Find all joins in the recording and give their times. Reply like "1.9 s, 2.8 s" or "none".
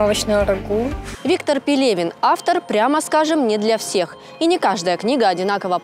1.0 s